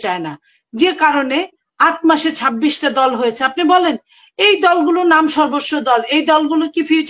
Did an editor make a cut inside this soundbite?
no; 0 cuts

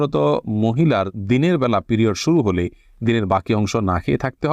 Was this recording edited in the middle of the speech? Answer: no; 0 cuts

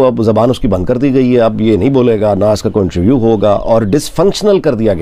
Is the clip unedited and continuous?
yes; 0 cuts

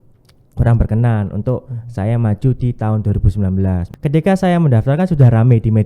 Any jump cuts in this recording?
yes; 1 cut; at 3.8 s

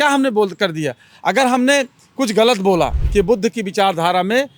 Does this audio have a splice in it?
yes; 1 cut; at 3.0 s

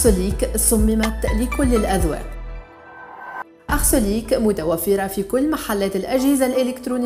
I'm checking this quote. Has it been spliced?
no; 0 cuts

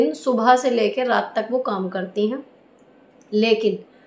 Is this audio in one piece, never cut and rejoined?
yes; 0 cuts

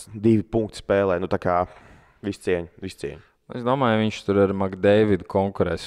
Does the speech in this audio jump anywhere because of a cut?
no; 0 cuts

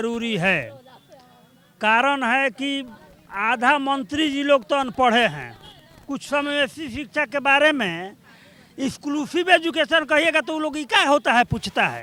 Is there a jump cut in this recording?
no; 0 cuts

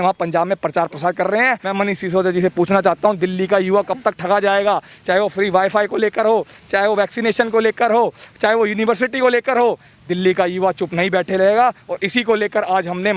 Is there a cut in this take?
yes; 1 cut; at 1.6 s

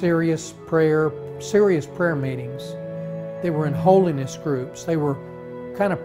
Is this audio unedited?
no; 1 cut; at 4.0 s

